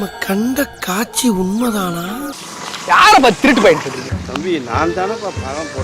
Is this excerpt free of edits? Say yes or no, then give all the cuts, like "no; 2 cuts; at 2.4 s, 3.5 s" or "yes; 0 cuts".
no; 2 cuts; at 2.4 s, 4.0 s